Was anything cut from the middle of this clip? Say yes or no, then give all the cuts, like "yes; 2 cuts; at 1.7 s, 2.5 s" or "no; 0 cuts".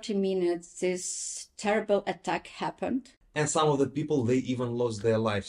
yes; 1 cut; at 3.2 s